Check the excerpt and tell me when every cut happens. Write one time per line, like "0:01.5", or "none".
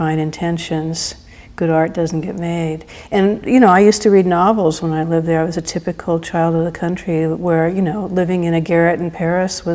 0:01.9